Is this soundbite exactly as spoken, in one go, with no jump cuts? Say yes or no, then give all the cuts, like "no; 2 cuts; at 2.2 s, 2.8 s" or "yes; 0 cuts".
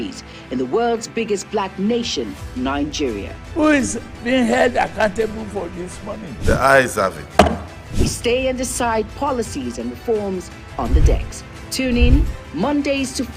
yes; 0 cuts